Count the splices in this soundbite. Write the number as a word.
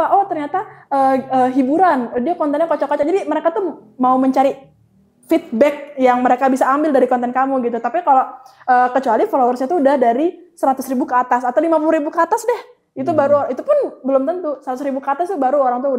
zero